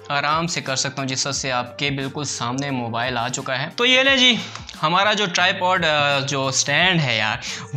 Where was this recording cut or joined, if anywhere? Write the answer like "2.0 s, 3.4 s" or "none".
3.7 s